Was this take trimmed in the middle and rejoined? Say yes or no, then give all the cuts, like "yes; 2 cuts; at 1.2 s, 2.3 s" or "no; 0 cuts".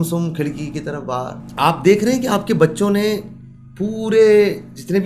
yes; 1 cut; at 1.4 s